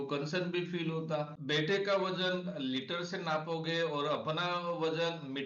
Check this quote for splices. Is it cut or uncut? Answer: cut